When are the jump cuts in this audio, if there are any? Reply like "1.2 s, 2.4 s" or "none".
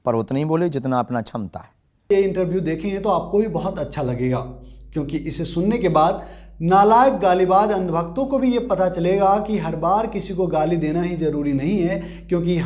2.1 s